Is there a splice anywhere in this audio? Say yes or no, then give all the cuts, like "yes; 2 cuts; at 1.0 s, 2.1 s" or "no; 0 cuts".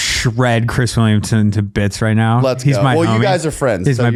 no; 0 cuts